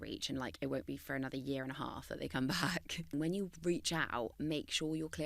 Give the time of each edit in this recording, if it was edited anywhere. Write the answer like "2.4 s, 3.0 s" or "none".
3.0 s

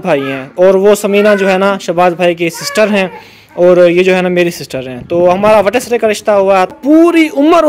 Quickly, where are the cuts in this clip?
6.8 s

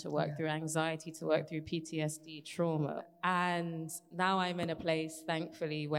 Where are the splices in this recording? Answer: 3.0 s

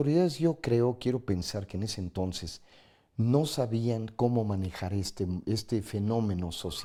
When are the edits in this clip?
none

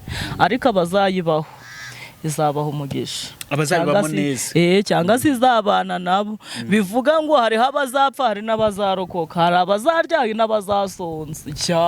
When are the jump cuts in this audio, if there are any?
none

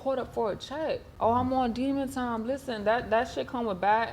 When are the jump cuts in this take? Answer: 1.1 s

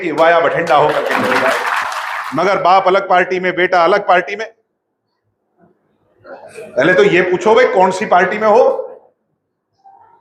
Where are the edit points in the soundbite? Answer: 1.9 s

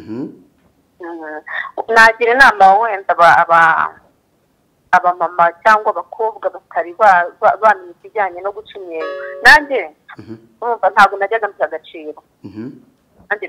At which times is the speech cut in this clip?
none

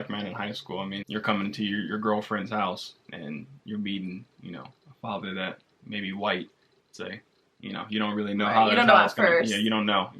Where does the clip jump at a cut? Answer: 1.0 s

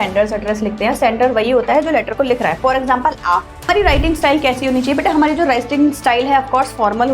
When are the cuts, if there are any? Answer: 3.7 s

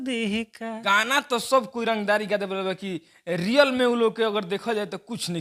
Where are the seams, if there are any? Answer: 0.9 s

